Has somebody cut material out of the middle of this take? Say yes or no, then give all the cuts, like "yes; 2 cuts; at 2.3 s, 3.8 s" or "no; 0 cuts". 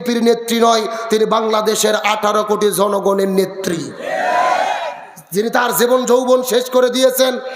no; 0 cuts